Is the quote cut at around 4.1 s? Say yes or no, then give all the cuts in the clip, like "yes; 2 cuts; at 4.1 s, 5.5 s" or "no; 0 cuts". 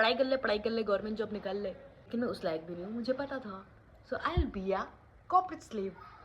no; 1 cut; at 1.9 s